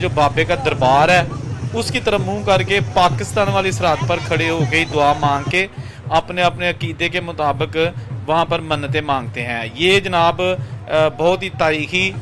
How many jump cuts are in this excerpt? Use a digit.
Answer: 0